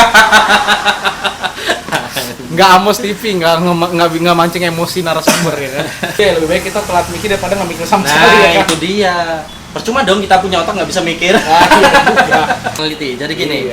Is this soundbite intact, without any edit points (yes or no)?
no